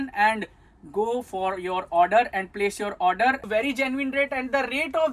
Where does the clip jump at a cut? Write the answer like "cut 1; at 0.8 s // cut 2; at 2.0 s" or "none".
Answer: cut 1; at 3.4 s